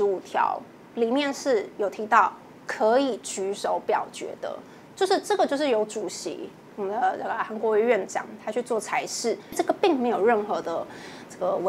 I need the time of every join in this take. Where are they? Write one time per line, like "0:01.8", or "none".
0:09.5